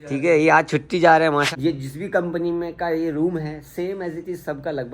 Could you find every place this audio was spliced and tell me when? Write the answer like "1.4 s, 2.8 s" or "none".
1.5 s